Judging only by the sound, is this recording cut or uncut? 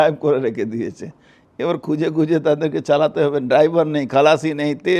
uncut